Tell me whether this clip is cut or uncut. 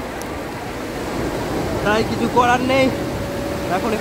uncut